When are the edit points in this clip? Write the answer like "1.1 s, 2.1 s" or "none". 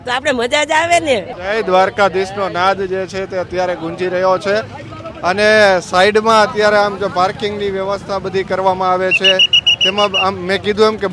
none